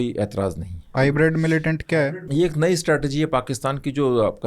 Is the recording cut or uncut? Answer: cut